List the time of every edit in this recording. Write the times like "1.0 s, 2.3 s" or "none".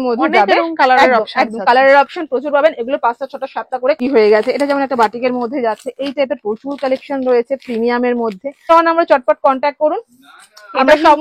4.0 s, 8.7 s